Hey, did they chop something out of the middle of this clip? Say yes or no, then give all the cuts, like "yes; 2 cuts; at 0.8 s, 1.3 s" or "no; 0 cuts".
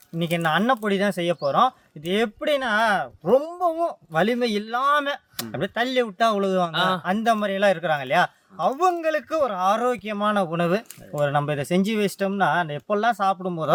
no; 0 cuts